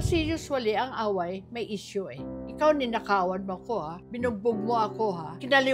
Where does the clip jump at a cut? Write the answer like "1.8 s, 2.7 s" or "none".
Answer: none